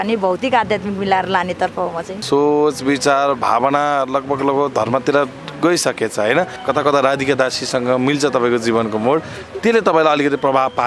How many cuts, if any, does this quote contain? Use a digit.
2